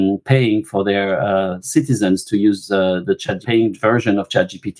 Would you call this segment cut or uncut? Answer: cut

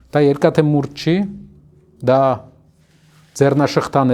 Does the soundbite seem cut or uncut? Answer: uncut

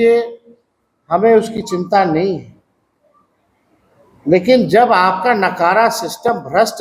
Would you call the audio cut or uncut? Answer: uncut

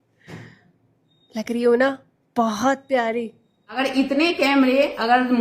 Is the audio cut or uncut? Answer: cut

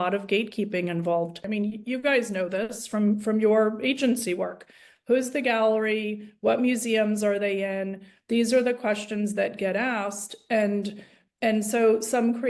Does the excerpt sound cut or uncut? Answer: cut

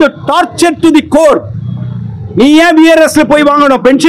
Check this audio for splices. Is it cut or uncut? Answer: uncut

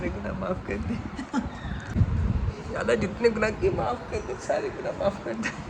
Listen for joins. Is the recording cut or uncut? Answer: cut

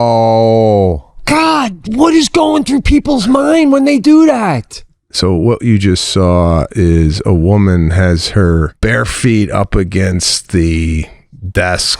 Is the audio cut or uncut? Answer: cut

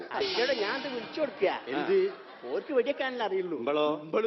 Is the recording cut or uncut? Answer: cut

